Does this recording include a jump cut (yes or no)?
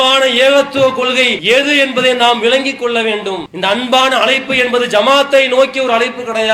yes